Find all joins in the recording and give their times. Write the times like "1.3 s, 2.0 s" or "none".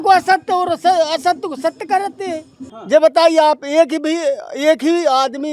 2.7 s